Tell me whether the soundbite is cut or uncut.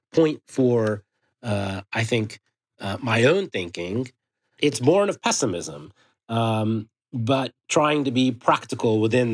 cut